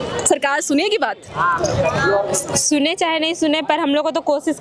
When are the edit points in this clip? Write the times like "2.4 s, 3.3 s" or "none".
none

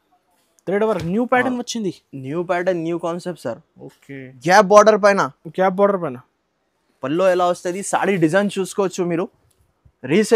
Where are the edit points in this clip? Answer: 4.3 s

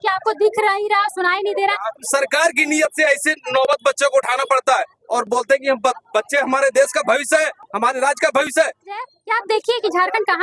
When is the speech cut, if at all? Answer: 2.0 s, 9.1 s

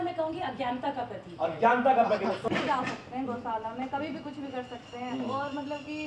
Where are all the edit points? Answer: 2.4 s

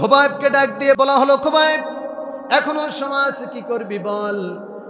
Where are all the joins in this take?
1.0 s

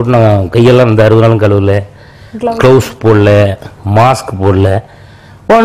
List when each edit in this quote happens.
none

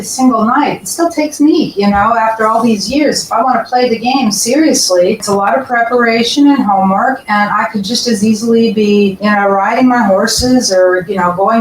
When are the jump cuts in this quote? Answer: 5.2 s, 9.2 s

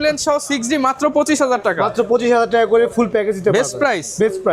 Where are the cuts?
none

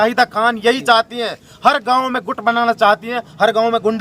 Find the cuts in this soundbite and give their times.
none

